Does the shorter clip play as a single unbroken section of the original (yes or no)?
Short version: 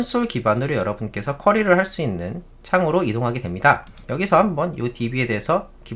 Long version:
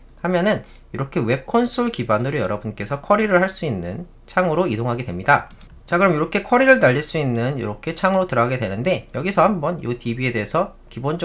no